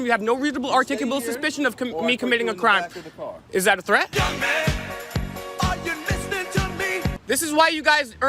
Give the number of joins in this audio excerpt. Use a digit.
2